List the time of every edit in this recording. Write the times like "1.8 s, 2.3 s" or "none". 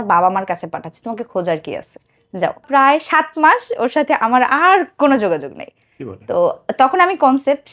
2.6 s